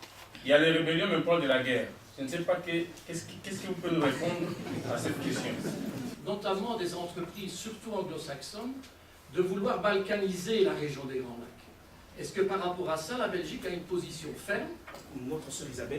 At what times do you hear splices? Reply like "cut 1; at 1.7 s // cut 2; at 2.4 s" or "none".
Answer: cut 1; at 6.1 s // cut 2; at 15.0 s